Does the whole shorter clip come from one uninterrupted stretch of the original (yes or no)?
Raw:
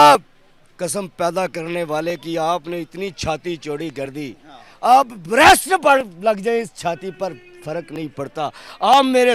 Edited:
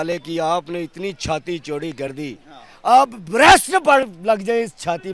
yes